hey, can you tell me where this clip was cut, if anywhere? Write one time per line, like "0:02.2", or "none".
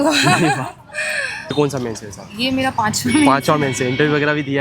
0:01.5